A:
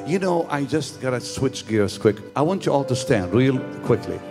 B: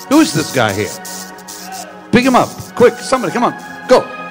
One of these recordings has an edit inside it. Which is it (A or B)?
A